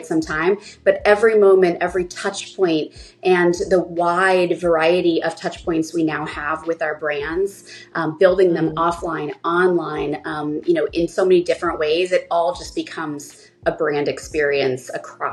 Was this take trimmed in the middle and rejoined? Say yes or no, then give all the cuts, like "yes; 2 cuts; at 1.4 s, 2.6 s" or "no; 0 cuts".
no; 0 cuts